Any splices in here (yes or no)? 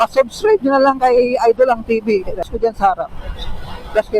yes